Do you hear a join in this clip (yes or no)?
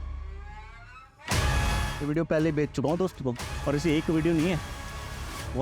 yes